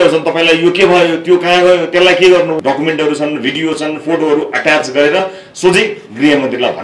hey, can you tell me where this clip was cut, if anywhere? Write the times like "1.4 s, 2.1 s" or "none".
2.6 s